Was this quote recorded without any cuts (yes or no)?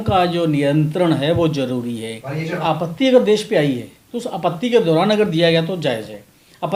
yes